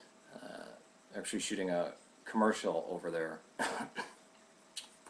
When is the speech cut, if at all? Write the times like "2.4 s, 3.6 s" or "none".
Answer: 2.6 s